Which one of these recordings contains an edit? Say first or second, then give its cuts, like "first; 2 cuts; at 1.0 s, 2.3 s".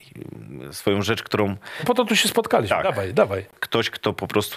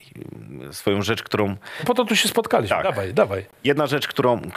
first; 1 cut; at 3.5 s